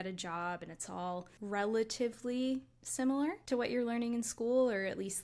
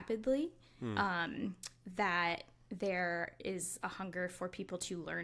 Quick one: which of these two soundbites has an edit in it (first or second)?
first